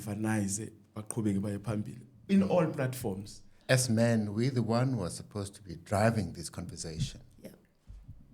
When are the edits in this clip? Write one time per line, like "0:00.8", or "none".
0:03.5